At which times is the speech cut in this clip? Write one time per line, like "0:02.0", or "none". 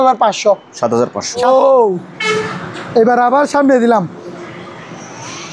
0:01.4